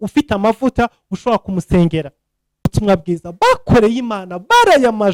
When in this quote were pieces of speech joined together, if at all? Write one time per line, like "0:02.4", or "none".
0:02.7